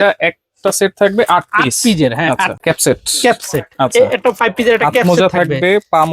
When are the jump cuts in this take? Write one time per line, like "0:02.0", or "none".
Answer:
0:02.5